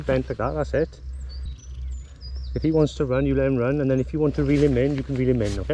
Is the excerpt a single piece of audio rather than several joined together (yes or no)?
no